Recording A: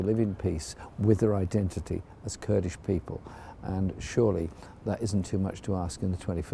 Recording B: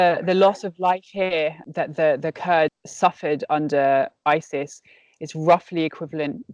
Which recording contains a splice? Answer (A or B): B